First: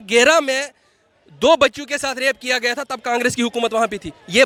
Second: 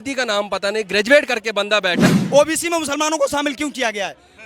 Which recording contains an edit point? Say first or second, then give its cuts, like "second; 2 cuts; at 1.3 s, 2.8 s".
second; 1 cut; at 2.1 s